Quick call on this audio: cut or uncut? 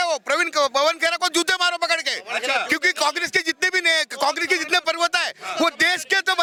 uncut